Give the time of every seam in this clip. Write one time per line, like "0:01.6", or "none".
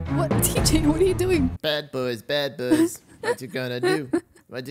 none